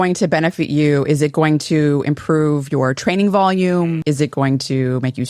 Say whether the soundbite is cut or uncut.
cut